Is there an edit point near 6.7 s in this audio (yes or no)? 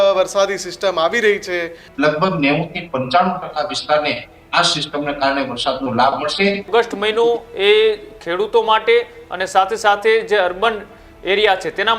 yes